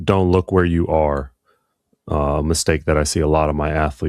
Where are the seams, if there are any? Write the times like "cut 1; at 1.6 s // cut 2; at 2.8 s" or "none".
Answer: none